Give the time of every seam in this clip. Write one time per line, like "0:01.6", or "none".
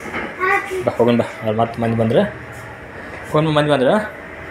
none